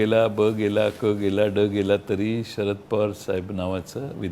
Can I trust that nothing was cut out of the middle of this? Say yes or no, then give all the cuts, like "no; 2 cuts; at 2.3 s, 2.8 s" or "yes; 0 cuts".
yes; 0 cuts